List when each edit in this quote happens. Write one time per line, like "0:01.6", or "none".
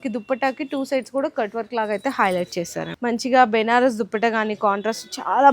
0:02.9